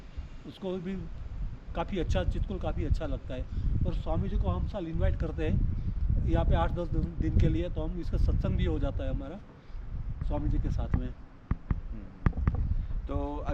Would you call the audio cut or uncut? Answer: uncut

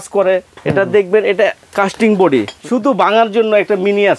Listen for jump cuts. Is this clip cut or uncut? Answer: cut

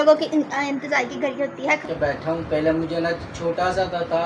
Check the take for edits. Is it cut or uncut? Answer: cut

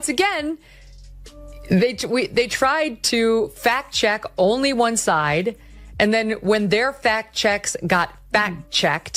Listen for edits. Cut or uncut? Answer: uncut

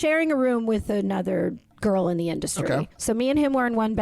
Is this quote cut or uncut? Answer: cut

